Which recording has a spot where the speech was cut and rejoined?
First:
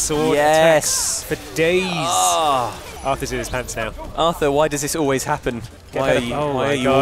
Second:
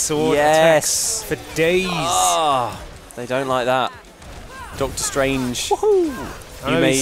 first; 3 cuts; at 2.9 s, 4.0 s, 5.7 s

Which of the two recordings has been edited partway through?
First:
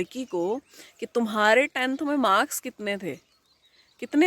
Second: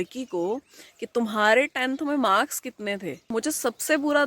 second; 1 cut; at 3.3 s

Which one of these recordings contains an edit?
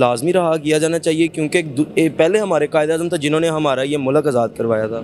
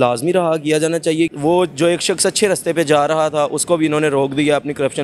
second; 1 cut; at 1.3 s

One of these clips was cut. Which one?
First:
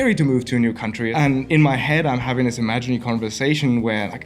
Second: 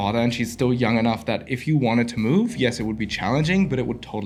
first; 1 cut; at 1.1 s

